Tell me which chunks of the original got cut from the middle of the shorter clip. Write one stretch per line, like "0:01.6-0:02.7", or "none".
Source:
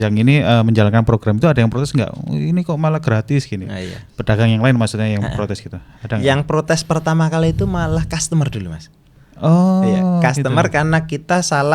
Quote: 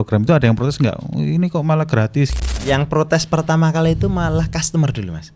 0:03.6-0:06.0